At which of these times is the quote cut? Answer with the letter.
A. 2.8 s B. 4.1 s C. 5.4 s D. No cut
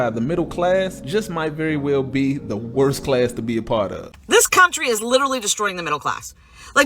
B